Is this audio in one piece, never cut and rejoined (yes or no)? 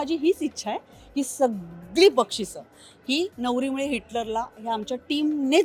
yes